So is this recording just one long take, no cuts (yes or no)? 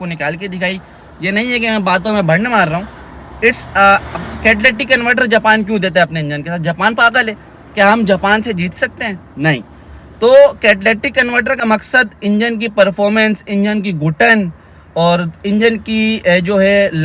no